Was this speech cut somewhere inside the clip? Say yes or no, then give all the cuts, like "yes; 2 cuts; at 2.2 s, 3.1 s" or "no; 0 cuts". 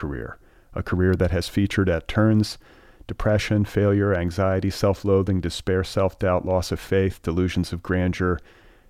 no; 0 cuts